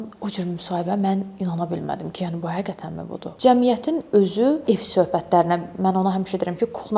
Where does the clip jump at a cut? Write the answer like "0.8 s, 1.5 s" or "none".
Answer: 3.3 s, 4.6 s